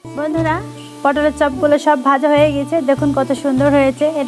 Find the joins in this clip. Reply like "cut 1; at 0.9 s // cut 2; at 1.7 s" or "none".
none